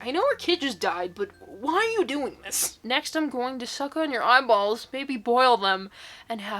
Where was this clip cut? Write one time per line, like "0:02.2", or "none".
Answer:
0:02.8